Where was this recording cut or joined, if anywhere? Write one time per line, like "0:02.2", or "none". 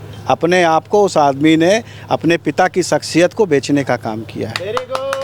none